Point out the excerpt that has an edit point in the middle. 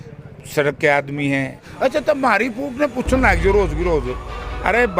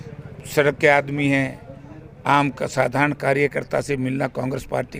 first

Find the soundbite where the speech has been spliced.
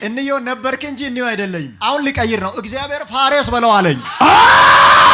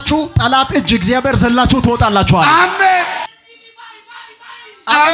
second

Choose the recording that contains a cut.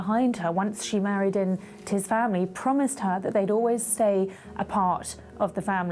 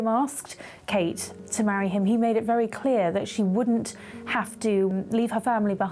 second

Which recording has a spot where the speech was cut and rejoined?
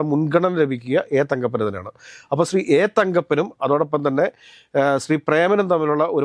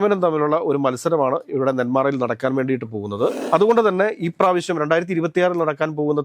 second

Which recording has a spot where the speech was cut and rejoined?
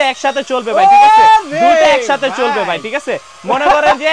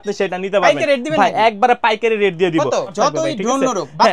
second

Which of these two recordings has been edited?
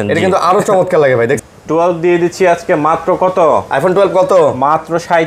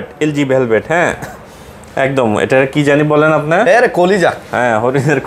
first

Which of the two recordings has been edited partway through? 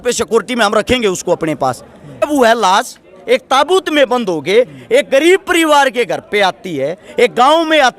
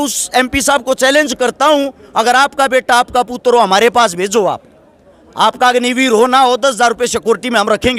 first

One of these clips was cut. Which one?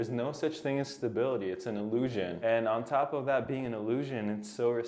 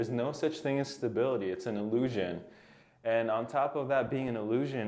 first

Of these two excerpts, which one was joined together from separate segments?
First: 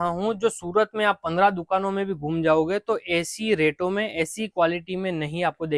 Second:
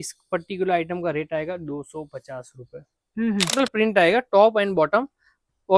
second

